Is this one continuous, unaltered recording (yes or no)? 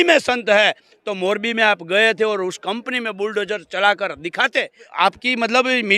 no